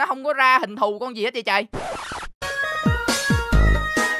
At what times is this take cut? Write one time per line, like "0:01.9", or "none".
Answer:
none